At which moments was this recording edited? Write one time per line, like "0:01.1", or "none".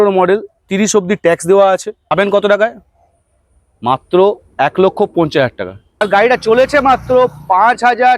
0:02.1
0:06.0